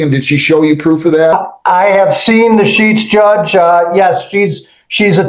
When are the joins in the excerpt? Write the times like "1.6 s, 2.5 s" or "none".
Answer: 1.3 s

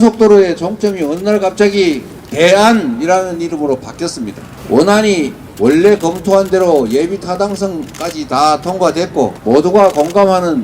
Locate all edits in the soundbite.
4.5 s, 5.4 s, 9.4 s

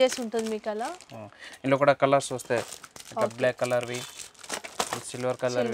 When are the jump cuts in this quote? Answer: none

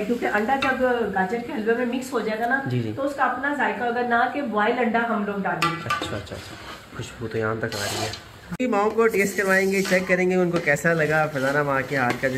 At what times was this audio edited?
8.6 s

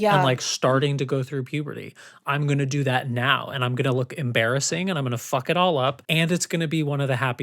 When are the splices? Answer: 6.0 s

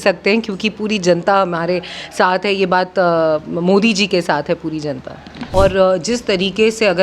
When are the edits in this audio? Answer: 5.5 s

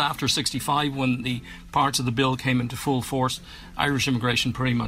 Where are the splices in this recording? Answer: 1.2 s

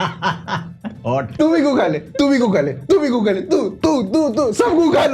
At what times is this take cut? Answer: 1.3 s

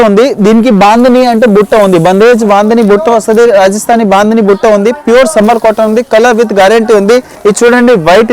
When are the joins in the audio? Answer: 7.3 s

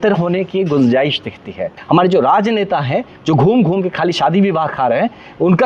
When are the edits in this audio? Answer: 1.7 s

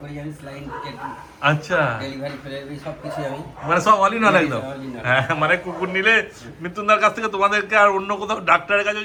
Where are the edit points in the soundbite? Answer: none

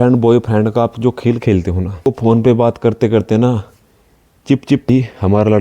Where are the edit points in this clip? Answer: 2.0 s, 4.9 s

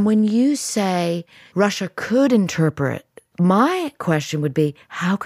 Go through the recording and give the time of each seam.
1.3 s, 3.2 s

